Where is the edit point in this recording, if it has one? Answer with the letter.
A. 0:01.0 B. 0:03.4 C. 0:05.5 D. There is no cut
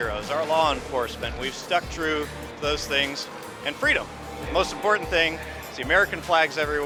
D